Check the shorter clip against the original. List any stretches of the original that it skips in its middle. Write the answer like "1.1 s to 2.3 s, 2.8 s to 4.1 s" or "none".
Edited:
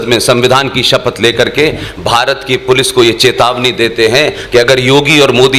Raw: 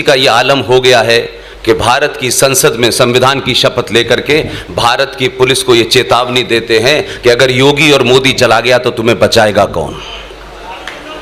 none